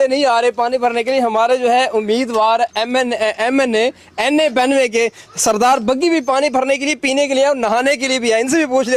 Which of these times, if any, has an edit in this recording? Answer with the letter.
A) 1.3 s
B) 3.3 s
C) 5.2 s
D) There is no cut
D